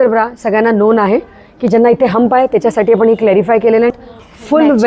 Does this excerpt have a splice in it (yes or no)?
yes